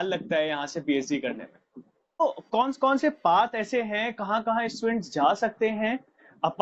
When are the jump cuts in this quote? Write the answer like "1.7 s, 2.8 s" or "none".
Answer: 2.2 s

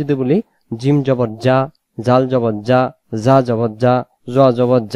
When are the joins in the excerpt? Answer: none

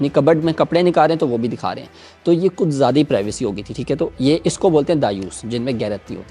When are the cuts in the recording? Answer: none

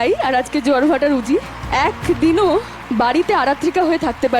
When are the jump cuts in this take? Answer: 1.6 s, 2.8 s

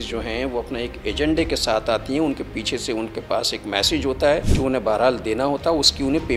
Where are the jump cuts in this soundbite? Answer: none

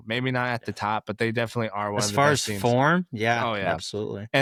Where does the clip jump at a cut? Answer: none

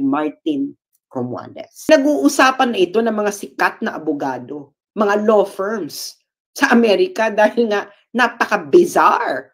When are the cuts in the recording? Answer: 1.9 s

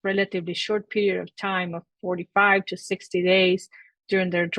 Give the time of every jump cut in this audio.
none

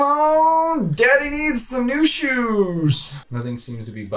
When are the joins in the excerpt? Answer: 3.1 s

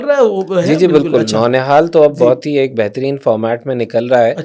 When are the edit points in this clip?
none

